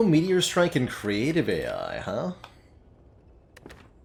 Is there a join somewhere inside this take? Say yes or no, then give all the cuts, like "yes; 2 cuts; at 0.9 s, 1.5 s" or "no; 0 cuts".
no; 0 cuts